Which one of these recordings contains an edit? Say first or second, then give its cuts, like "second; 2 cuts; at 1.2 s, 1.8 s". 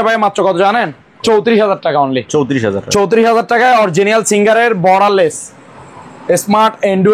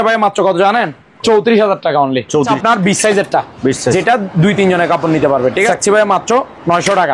second; 2 cuts; at 2.5 s, 5.7 s